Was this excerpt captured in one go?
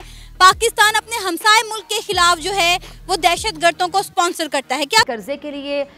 no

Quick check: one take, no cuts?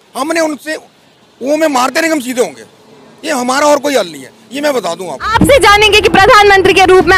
yes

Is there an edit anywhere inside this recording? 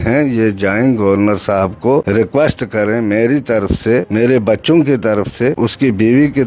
yes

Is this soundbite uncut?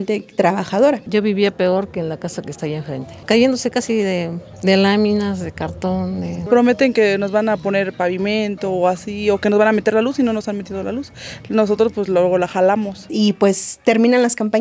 no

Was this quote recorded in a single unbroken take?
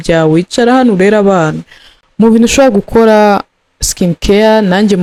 yes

